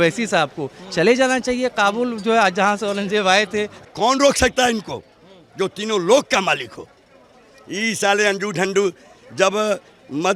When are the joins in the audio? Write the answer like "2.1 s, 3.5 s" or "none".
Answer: 3.8 s